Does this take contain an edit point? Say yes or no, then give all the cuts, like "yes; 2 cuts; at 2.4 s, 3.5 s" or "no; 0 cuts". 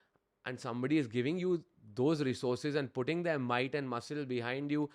no; 0 cuts